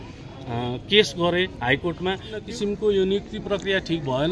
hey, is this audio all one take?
no; 1 cut; at 2.4 s

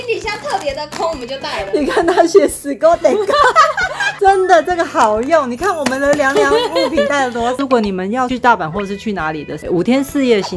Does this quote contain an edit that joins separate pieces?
yes; 1 cut; at 7.6 s

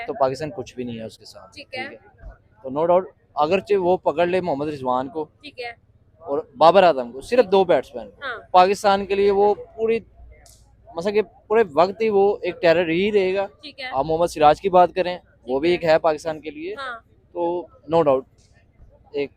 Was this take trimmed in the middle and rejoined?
no; 0 cuts

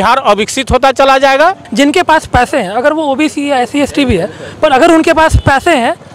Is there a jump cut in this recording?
yes; 1 cut; at 1.6 s

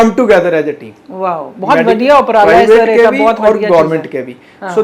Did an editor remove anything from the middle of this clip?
no; 0 cuts

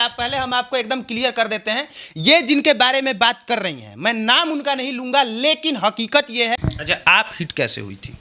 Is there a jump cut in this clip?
yes; 1 cut; at 6.6 s

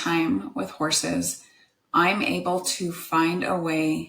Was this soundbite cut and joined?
no; 0 cuts

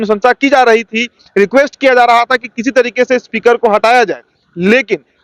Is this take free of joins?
yes; 0 cuts

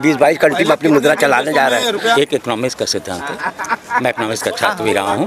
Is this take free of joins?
no; 1 cut; at 2.2 s

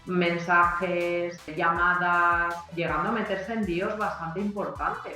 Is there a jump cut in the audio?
yes; 2 cuts; at 1.5 s, 2.7 s

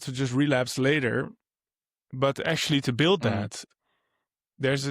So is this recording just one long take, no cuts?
no; 1 cut; at 3.6 s

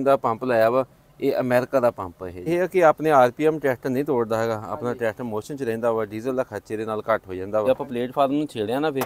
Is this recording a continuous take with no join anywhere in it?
no; 2 cuts; at 2.5 s, 7.6 s

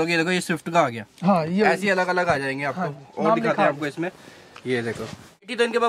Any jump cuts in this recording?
no; 0 cuts

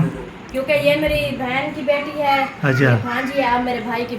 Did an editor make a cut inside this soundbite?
no; 0 cuts

